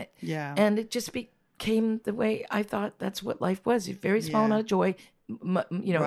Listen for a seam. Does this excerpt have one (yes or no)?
no